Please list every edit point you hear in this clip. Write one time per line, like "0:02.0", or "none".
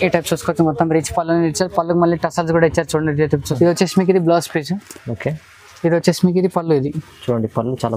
0:03.5